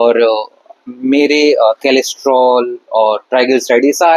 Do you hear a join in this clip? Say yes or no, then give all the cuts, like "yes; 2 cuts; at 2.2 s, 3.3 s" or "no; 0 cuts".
no; 0 cuts